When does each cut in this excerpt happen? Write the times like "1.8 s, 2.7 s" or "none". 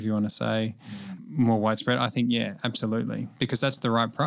0.9 s, 3.3 s